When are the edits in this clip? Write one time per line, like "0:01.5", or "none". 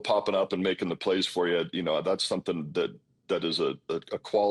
none